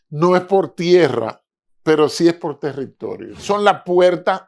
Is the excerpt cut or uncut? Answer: cut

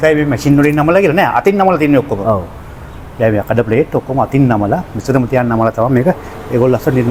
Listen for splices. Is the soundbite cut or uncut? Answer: uncut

